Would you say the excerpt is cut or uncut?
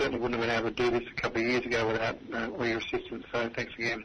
uncut